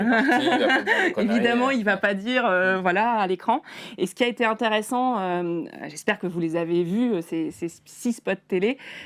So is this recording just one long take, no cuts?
yes; 0 cuts

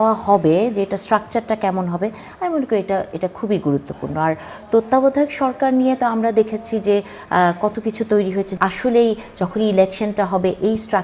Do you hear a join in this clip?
yes; 1 cut; at 8.5 s

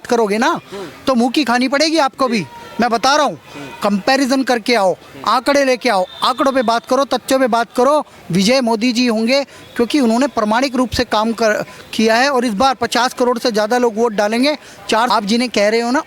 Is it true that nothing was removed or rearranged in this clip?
no; 1 cut; at 15.1 s

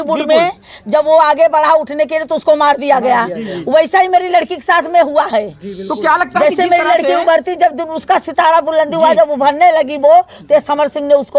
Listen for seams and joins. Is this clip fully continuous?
yes; 0 cuts

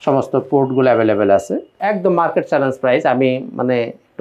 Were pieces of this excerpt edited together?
yes; 1 cut; at 1.7 s

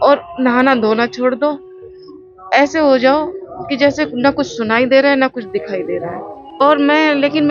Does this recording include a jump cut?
yes; 1 cut; at 6.6 s

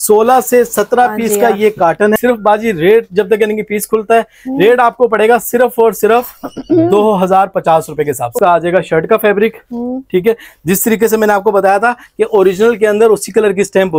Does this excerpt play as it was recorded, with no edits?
no; 2 cuts; at 2.1 s, 8.3 s

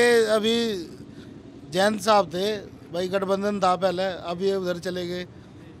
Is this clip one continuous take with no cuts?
yes; 0 cuts

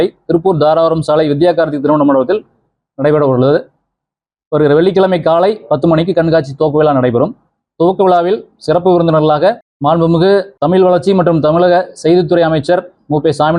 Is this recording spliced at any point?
yes; 2 cuts; at 9.7 s, 10.5 s

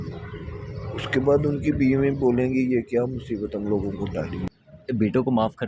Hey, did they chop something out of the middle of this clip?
yes; 1 cut; at 4.4 s

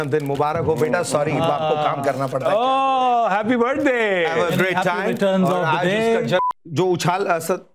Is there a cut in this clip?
yes; 1 cut; at 6.4 s

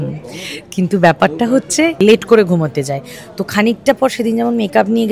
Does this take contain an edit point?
yes; 1 cut; at 2.0 s

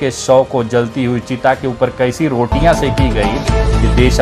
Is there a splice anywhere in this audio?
no; 0 cuts

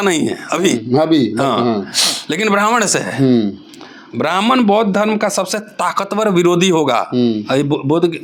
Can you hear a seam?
no; 0 cuts

